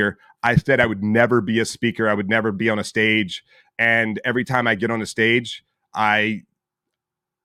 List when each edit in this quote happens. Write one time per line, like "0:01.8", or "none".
none